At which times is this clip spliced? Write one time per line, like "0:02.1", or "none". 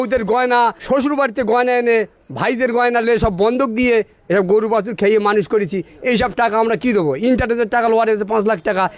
none